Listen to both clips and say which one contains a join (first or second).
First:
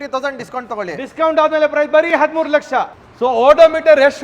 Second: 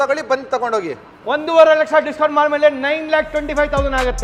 first